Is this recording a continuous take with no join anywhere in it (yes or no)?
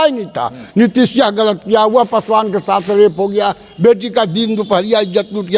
yes